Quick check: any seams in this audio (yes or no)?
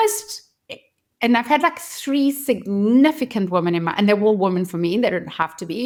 no